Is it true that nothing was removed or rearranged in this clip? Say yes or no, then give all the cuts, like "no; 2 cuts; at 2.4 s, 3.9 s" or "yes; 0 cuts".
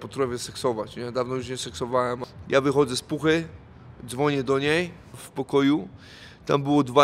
no; 2 cuts; at 2.3 s, 5.2 s